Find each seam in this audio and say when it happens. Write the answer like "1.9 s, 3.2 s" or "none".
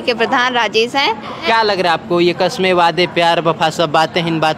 none